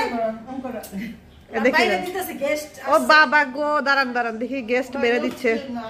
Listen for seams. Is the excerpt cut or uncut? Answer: uncut